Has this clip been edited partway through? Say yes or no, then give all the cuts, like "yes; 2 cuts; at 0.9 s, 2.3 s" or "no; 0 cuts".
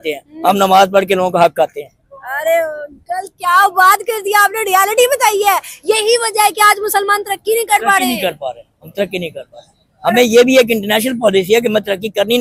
no; 0 cuts